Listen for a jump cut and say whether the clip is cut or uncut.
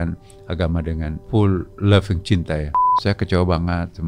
cut